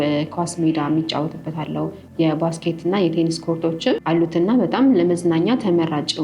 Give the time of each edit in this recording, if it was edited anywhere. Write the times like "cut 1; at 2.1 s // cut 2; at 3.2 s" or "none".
cut 1; at 4.0 s